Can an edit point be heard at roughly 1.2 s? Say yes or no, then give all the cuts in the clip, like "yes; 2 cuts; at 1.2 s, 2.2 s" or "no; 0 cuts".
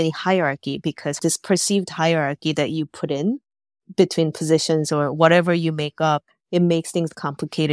yes; 1 cut; at 1.2 s